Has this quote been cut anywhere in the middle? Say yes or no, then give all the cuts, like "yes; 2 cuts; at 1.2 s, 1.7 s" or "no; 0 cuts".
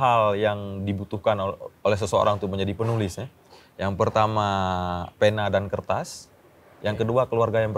no; 0 cuts